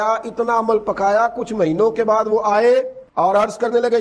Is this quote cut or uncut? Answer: uncut